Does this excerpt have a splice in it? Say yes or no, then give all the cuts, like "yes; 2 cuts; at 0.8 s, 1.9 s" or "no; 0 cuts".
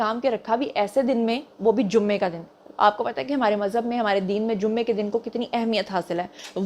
no; 0 cuts